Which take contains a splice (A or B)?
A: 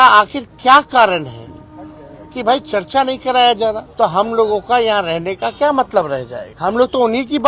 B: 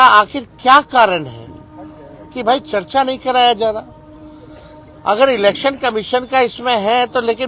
A